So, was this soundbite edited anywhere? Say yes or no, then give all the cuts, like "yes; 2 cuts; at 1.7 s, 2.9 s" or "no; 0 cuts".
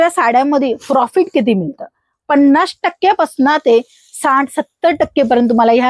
no; 0 cuts